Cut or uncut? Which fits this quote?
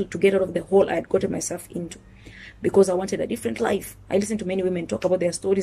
uncut